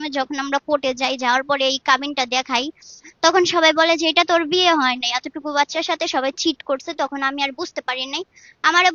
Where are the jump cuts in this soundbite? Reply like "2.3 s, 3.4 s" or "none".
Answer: none